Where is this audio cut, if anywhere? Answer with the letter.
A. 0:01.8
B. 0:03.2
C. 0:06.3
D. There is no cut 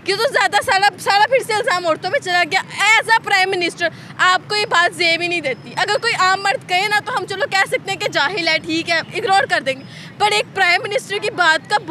D